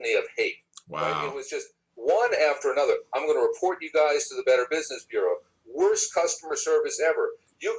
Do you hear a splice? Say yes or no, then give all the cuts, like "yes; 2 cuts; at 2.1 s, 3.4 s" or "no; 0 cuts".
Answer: no; 0 cuts